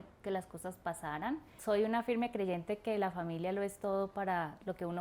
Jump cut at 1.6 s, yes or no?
yes